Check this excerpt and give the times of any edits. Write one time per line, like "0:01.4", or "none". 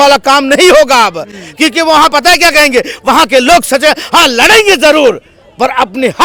none